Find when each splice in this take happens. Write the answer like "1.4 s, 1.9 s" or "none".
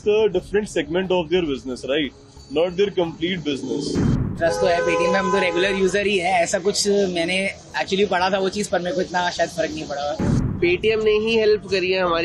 4.3 s, 10.4 s

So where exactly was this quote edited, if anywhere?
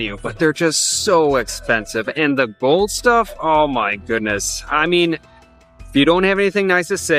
none

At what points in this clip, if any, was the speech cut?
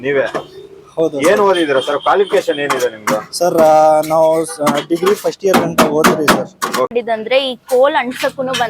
6.9 s

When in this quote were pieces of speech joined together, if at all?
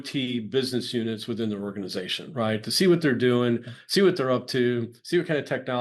none

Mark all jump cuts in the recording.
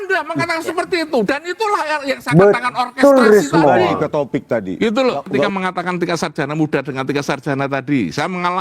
5.5 s

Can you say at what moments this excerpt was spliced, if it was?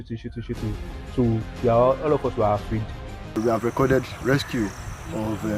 3.4 s

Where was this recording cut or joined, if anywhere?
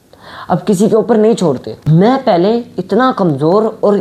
1.7 s

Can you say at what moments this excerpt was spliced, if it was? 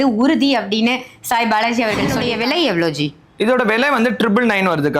2.2 s

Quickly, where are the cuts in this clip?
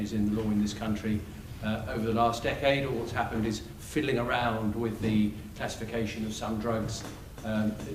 6.4 s

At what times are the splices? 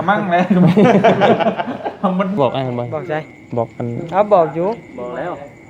2.4 s

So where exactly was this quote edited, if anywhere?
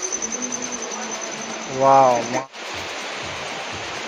2.4 s

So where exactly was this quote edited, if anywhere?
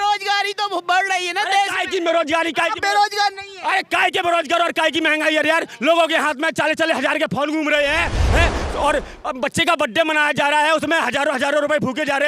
none

